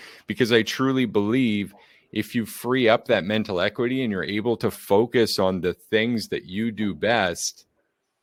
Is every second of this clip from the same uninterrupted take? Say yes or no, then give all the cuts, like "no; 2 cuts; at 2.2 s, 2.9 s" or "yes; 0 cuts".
yes; 0 cuts